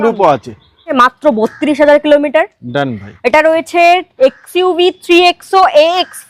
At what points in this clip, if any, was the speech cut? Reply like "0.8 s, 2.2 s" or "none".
0.9 s